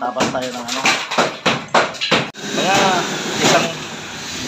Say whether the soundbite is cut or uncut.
cut